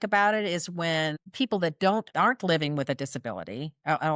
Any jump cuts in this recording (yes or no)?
yes